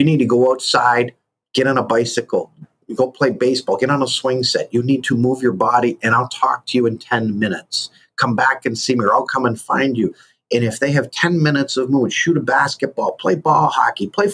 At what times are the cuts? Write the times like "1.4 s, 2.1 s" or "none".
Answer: 2.8 s, 9.2 s